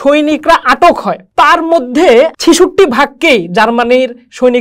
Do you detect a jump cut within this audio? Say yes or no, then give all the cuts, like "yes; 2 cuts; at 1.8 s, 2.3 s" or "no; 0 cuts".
yes; 2 cuts; at 1.2 s, 2.3 s